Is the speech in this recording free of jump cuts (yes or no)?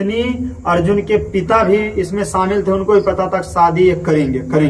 yes